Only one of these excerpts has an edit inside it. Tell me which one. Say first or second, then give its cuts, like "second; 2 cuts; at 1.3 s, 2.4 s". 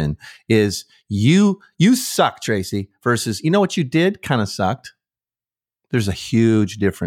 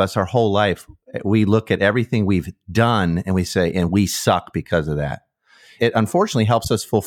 second; 1 cut; at 5.7 s